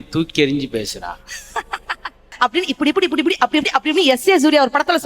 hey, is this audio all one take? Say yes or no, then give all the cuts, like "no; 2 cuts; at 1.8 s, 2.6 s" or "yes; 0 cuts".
no; 1 cut; at 2.3 s